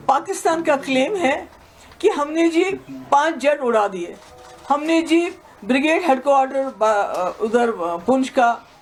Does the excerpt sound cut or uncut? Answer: uncut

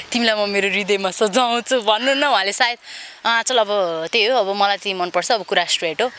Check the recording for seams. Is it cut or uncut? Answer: uncut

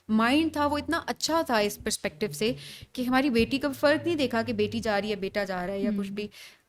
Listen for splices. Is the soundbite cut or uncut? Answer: uncut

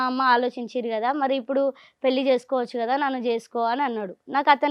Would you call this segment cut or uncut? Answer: uncut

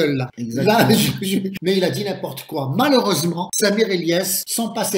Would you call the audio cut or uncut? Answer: cut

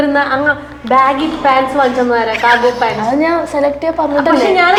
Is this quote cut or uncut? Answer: uncut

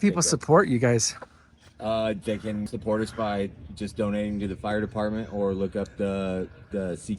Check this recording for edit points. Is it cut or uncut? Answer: cut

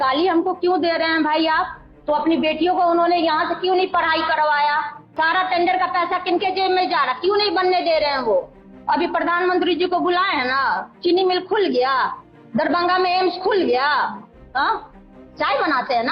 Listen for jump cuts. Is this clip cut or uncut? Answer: cut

